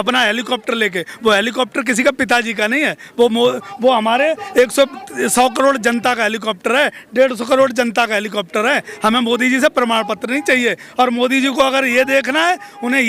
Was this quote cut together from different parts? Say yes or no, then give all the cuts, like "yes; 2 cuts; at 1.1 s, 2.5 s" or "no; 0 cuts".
no; 0 cuts